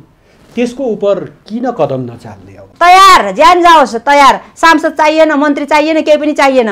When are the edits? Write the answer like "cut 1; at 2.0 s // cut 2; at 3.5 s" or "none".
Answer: cut 1; at 2.5 s